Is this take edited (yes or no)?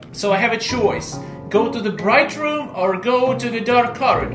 no